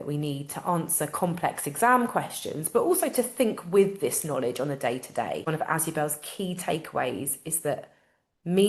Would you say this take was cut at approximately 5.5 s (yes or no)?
yes